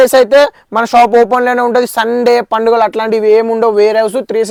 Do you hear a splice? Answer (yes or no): no